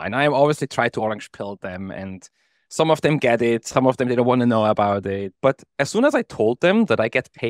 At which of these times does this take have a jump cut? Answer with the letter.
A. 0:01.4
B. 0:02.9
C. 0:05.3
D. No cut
C